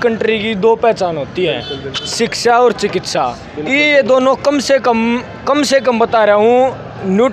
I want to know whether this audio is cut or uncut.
uncut